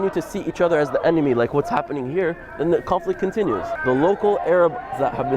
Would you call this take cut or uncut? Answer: cut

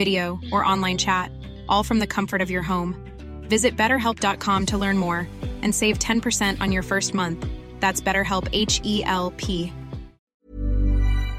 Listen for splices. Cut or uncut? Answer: cut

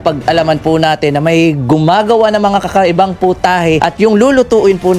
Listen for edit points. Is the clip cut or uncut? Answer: cut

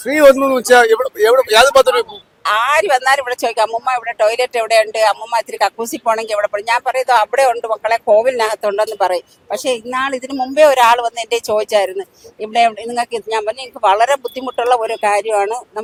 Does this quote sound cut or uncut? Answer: uncut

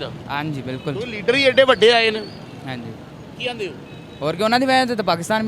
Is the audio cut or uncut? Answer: uncut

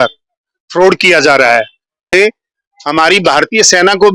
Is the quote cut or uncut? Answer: cut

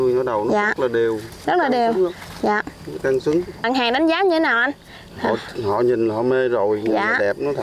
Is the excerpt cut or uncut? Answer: cut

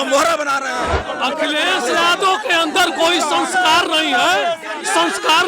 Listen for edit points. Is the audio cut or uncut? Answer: cut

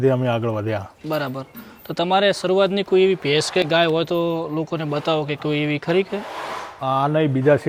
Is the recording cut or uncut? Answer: uncut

